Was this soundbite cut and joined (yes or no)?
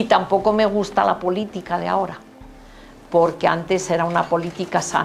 no